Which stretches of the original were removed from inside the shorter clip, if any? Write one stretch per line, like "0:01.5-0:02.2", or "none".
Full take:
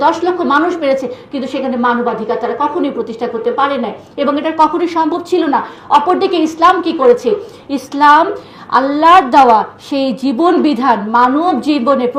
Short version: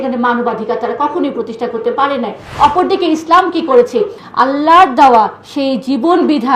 0:04.0-0:05.7
0:07.5-0:08.6

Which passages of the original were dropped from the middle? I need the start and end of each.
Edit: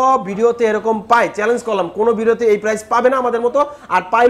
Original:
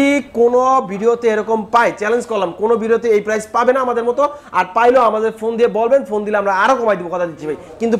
none

